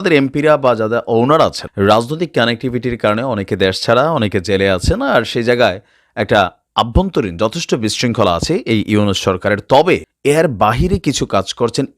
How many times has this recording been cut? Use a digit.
2